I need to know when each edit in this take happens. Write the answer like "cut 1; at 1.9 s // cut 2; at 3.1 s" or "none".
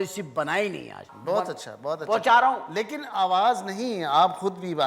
cut 1; at 1.0 s